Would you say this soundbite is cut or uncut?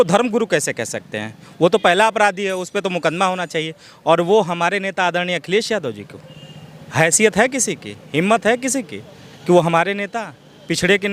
uncut